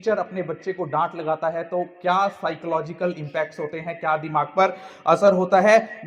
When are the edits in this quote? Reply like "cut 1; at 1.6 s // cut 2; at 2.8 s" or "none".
none